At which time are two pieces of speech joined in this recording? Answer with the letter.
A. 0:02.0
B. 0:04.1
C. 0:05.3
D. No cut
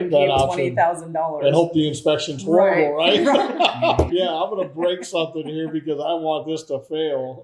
B